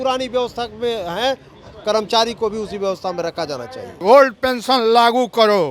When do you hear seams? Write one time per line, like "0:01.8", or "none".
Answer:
0:03.9